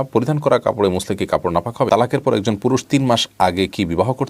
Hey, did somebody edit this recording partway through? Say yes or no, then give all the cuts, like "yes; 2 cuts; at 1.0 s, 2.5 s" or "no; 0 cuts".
yes; 1 cut; at 1.9 s